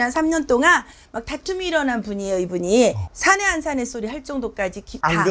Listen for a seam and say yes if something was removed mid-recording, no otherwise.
yes